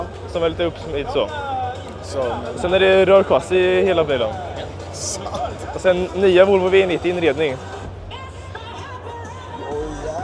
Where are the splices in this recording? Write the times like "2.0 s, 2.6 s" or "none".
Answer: none